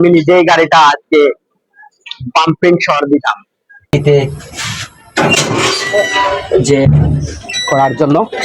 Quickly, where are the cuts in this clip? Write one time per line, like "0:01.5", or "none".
0:03.9